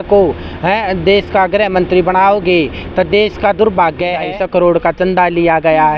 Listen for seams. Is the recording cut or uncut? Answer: cut